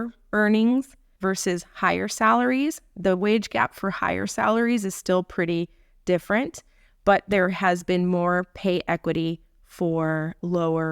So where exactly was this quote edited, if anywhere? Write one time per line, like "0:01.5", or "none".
0:01.0